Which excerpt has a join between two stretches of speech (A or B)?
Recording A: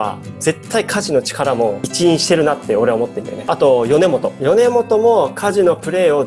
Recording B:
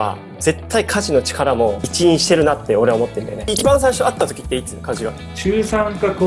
B